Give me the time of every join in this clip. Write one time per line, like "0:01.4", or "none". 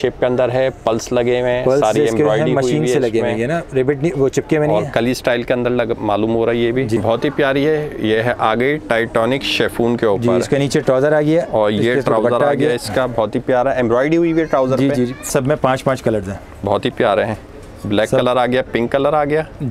0:07.0
0:15.3